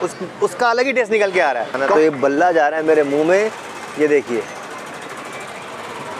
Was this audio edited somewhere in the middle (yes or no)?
yes